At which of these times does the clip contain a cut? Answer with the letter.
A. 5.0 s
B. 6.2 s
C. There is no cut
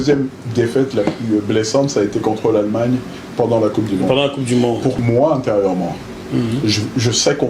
A